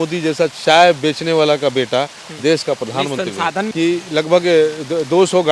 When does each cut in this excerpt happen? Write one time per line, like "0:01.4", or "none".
0:03.7